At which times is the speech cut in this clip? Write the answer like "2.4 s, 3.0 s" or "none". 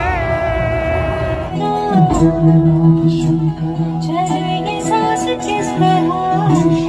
1.5 s